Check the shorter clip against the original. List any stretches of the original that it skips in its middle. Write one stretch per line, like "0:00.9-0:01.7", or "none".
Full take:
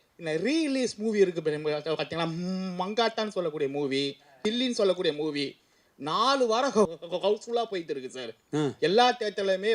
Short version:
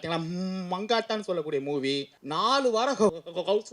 0:04.2-0:05.9